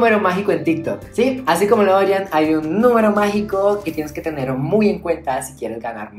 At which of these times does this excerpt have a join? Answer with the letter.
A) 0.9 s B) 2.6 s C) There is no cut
C